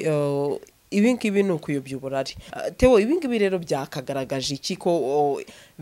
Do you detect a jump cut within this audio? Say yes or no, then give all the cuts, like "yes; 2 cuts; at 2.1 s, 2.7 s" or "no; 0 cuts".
yes; 1 cut; at 2.5 s